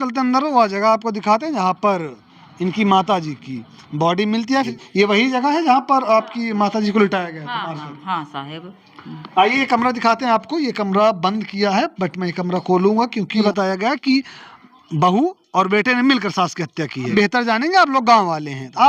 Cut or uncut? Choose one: cut